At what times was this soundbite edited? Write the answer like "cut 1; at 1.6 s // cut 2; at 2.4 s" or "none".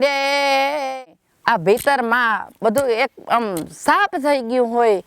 cut 1; at 0.9 s